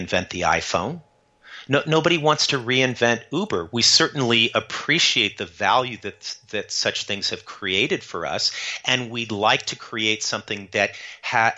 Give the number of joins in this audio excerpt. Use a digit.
0